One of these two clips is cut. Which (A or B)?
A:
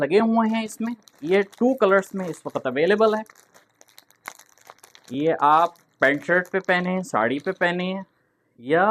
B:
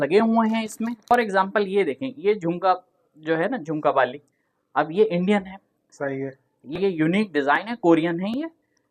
B